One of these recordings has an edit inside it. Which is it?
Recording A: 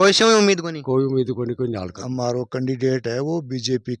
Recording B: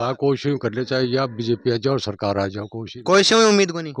A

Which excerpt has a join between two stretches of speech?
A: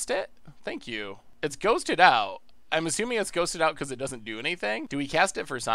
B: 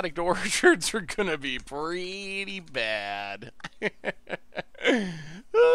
A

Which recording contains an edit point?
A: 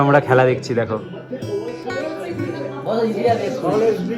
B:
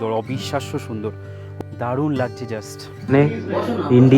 B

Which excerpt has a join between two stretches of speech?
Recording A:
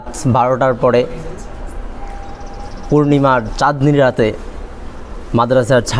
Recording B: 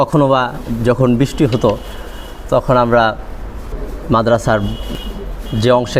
B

